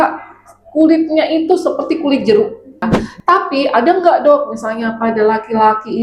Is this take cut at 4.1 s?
no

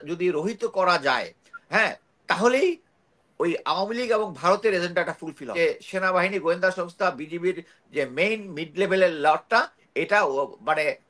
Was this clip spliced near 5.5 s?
yes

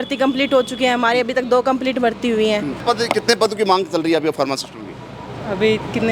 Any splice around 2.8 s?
yes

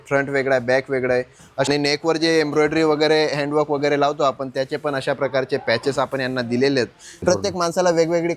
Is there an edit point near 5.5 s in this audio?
no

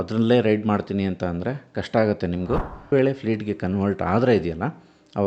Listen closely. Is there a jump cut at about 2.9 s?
yes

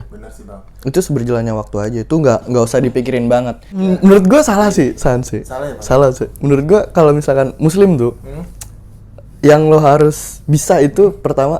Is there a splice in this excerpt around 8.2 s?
no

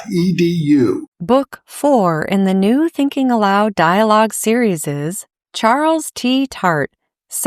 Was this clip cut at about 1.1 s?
yes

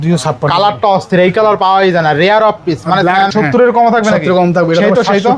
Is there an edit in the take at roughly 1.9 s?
no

